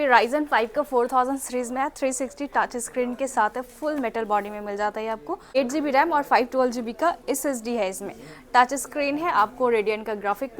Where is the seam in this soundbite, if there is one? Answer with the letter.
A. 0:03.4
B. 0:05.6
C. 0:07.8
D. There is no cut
B